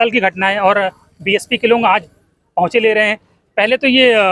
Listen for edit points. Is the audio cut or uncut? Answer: uncut